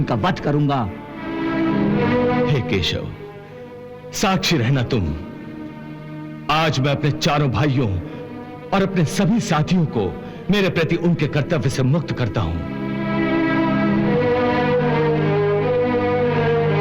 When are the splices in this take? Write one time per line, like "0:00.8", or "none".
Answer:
0:01.3